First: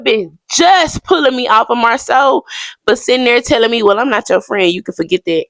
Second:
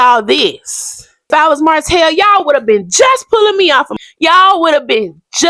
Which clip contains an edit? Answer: second; 2 cuts; at 1.3 s, 3.9 s

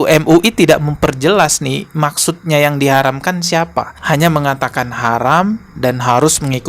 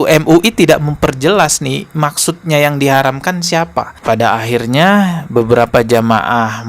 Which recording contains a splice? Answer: second; 1 cut; at 4.0 s

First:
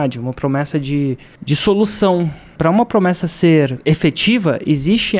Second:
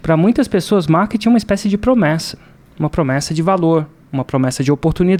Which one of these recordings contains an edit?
first; 3 cuts; at 1.3 s, 2.5 s, 3.8 s

